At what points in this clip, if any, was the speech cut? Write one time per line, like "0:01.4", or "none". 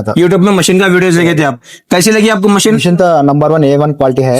0:01.7